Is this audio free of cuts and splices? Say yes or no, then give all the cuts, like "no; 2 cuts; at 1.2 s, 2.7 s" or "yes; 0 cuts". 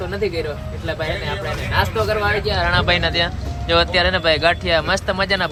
yes; 0 cuts